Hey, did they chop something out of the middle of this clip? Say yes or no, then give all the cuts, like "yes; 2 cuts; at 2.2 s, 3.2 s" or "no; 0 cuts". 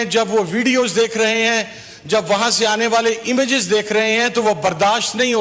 no; 0 cuts